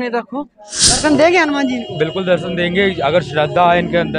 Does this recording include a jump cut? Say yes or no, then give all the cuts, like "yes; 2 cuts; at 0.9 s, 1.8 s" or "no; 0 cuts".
yes; 1 cut; at 1.0 s